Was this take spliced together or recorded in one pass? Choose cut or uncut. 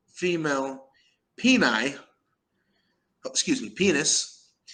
uncut